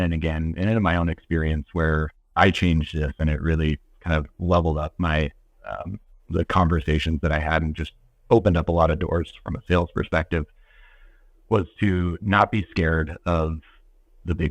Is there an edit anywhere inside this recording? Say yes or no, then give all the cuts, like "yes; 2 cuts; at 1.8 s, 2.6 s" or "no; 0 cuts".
no; 0 cuts